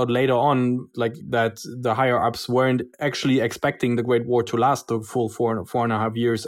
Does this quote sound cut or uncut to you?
cut